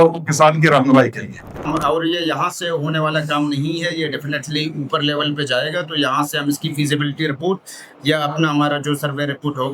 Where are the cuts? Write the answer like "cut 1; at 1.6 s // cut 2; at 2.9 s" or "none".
cut 1; at 1.6 s